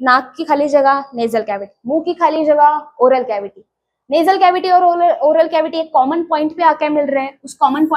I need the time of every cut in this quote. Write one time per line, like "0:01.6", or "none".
none